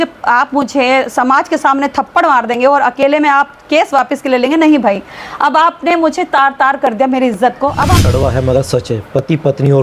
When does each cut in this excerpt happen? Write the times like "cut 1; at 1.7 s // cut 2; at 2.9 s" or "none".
cut 1; at 8.0 s